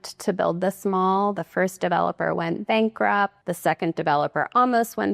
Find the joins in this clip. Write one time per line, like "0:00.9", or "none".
0:03.4